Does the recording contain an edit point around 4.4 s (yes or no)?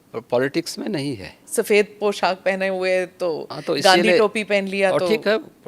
no